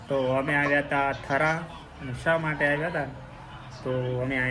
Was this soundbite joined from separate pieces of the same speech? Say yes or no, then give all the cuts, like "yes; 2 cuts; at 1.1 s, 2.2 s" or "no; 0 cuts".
no; 0 cuts